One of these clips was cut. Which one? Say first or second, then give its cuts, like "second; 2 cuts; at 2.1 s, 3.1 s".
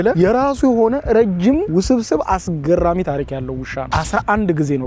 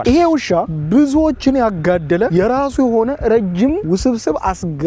first; 1 cut; at 3.9 s